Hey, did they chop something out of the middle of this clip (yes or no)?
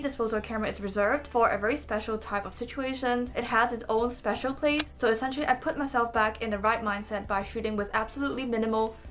yes